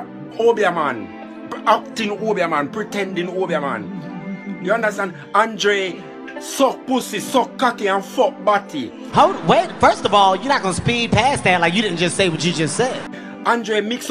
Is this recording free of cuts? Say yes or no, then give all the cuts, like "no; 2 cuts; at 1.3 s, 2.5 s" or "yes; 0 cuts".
yes; 0 cuts